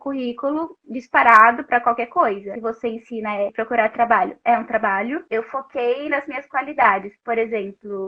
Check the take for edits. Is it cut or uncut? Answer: cut